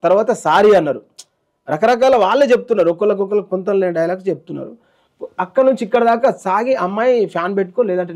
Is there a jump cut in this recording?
no; 0 cuts

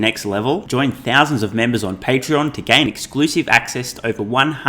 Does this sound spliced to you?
no; 0 cuts

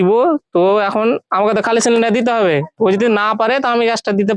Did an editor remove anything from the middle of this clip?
no; 0 cuts

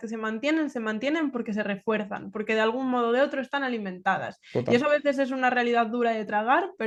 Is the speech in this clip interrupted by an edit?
no; 0 cuts

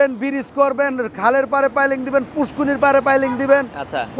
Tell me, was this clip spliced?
no; 0 cuts

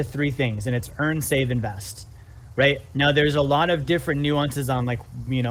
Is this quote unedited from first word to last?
yes; 0 cuts

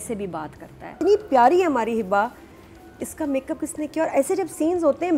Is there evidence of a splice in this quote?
yes; 1 cut; at 0.9 s

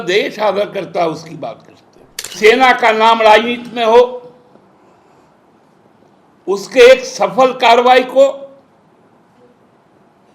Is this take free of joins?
no; 1 cut; at 2.3 s

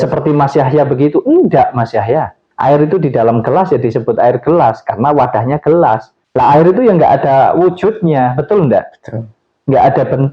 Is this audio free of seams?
no; 1 cut; at 2.4 s

